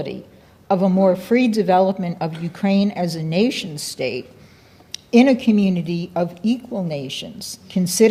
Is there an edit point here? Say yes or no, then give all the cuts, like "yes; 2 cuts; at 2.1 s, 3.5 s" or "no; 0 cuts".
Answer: no; 0 cuts